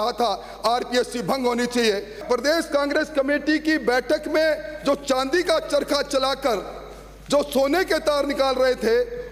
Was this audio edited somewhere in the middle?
yes; 1 cut; at 2.2 s

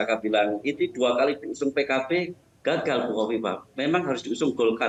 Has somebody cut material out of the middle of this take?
no; 0 cuts

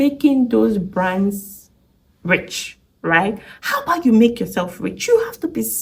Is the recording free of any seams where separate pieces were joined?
yes; 0 cuts

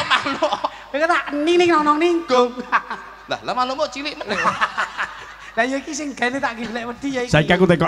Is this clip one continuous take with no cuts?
yes; 0 cuts

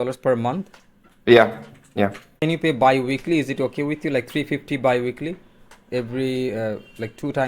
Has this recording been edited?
yes; 1 cut; at 2.4 s

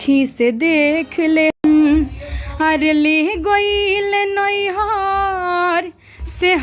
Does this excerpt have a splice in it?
yes; 1 cut; at 1.6 s

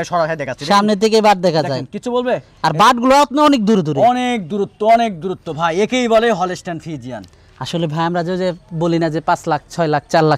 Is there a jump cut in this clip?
no; 0 cuts

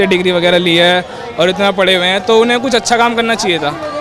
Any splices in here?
no; 0 cuts

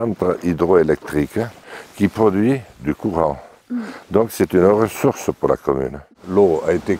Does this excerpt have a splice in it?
yes; 2 cuts; at 1.6 s, 6.1 s

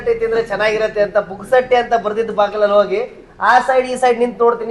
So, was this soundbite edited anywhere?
no; 0 cuts

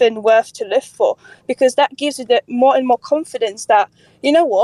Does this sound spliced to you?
no; 0 cuts

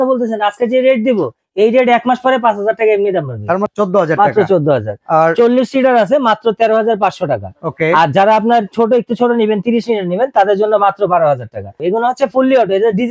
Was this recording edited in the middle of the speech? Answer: yes; 2 cuts; at 3.7 s, 11.8 s

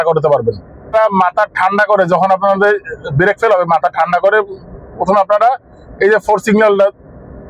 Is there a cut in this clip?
yes; 1 cut; at 0.9 s

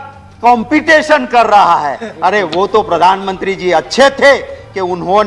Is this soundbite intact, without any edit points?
yes; 0 cuts

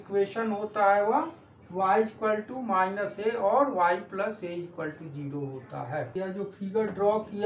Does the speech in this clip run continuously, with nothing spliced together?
no; 1 cut; at 6.1 s

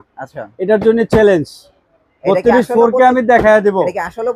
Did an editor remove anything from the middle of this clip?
no; 0 cuts

